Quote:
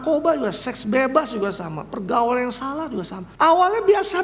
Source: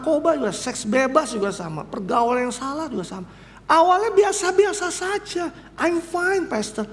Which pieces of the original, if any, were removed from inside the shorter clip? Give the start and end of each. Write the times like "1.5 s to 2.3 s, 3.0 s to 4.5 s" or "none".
3.2 s to 3.5 s